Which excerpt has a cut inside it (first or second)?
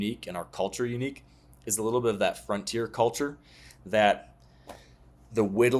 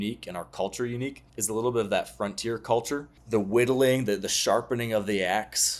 second